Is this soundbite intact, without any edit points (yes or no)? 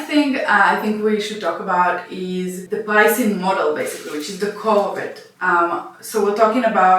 no